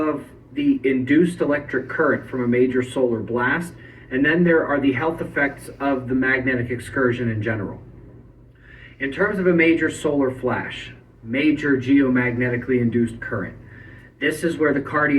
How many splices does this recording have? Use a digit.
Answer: 1